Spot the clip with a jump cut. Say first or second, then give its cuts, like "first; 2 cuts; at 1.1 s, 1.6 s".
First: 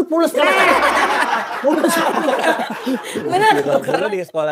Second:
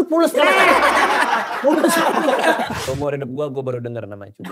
second; 1 cut; at 2.8 s